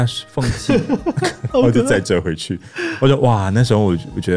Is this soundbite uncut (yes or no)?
yes